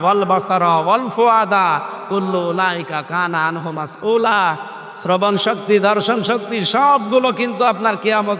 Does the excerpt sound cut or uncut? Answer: uncut